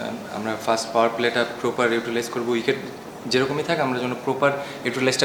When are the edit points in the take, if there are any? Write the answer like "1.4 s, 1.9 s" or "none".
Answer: none